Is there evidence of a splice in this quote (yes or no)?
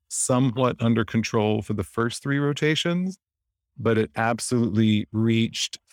no